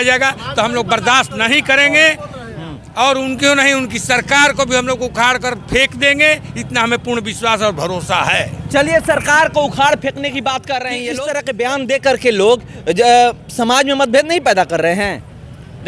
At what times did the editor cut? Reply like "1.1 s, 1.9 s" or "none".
none